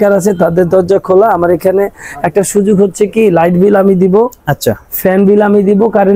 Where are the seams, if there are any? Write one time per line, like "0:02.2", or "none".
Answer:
none